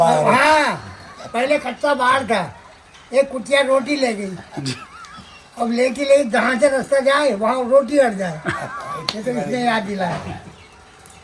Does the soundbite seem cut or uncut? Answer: uncut